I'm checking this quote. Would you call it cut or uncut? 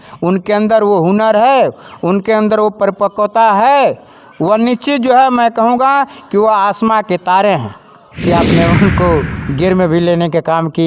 cut